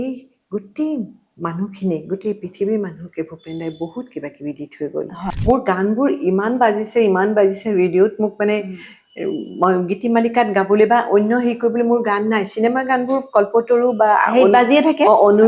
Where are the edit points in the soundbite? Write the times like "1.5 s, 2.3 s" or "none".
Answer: 5.3 s

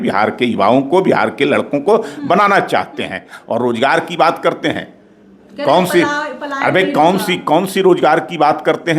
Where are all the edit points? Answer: none

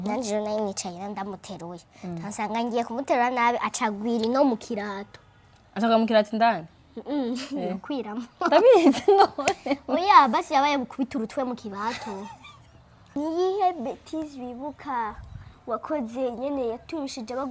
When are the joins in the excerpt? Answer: 13.2 s

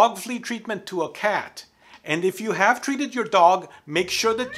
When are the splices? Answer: none

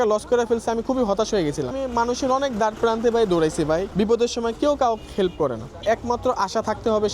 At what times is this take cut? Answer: 1.7 s, 3.9 s, 5.8 s

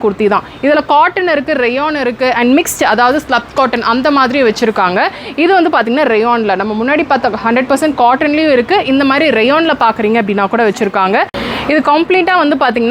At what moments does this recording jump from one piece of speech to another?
11.4 s

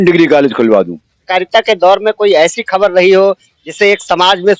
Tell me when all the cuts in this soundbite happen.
1.3 s

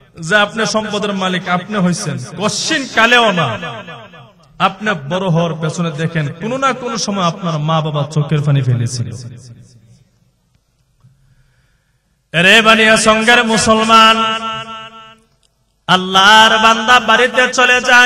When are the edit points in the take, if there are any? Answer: none

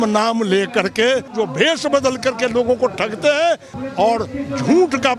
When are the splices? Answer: 1.3 s, 3.8 s

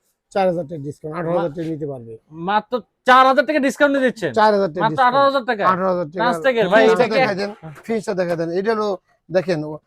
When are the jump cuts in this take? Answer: 7.3 s

